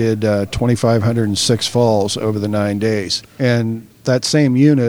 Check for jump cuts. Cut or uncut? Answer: cut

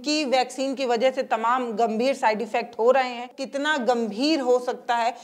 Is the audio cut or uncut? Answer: cut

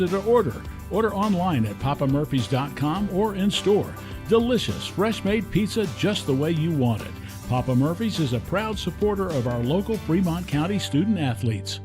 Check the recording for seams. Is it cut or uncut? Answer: uncut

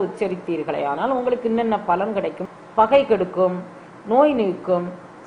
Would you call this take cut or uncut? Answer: cut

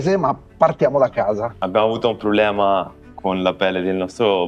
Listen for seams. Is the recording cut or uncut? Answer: cut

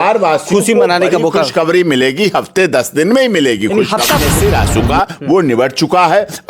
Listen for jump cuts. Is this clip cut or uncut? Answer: cut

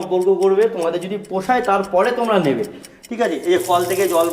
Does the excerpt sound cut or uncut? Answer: uncut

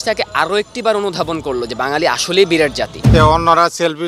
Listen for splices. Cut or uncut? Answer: cut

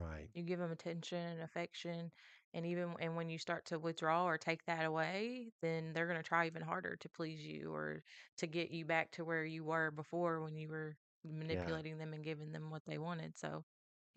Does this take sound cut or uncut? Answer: uncut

